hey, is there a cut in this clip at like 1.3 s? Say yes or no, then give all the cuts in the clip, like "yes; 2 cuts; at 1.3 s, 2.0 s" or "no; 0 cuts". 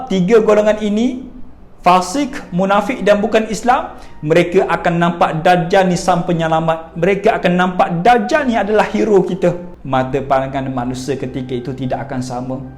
no; 0 cuts